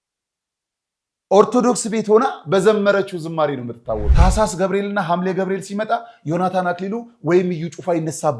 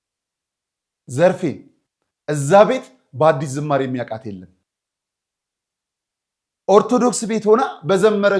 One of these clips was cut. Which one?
first; 1 cut; at 4.1 s

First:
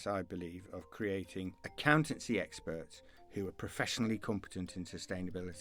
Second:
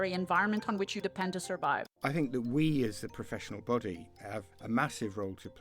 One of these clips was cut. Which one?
second; 2 cuts; at 1.9 s, 4.5 s

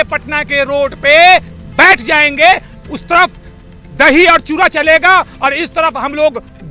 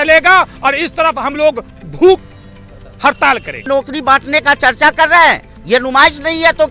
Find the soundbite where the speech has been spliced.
second; 1 cut; at 3.6 s

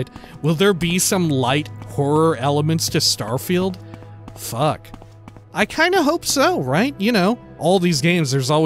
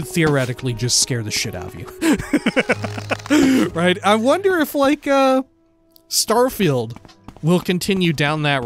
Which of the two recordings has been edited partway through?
first; 1 cut; at 7.5 s

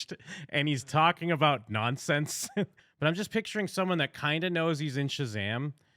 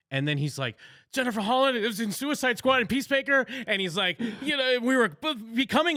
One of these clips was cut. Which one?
first; 1 cut; at 2.8 s

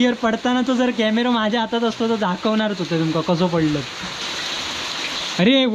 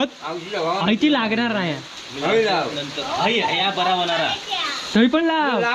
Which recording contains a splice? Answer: first; 1 cut; at 4.2 s

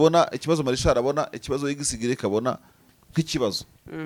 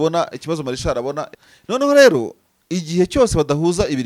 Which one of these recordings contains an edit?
second; 1 cut; at 1.4 s

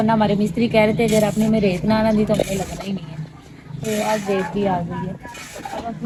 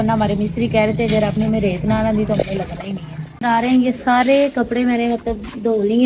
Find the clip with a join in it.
second; 1 cut; at 3.4 s

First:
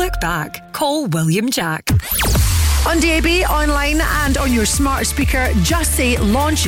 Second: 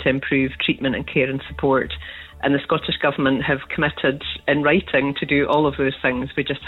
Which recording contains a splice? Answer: first; 1 cut; at 1.8 s

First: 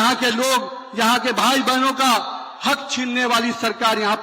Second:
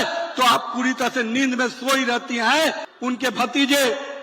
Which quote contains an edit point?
second; 1 cut; at 2.9 s

